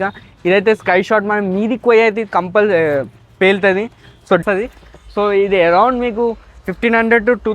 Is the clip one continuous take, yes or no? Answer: no